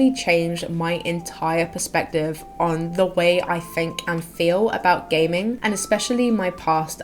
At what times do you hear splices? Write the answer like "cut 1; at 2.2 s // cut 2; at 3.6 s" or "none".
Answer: cut 1; at 5.6 s